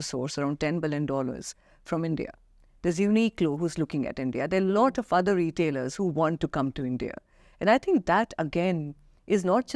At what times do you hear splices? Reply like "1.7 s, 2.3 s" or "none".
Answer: none